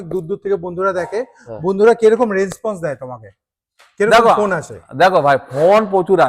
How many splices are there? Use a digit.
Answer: 0